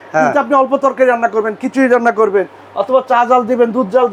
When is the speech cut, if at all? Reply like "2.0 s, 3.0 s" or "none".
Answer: none